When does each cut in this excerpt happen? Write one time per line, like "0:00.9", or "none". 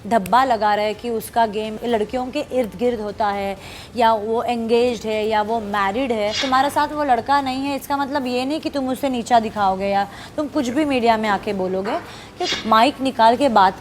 0:01.8
0:06.4
0:12.4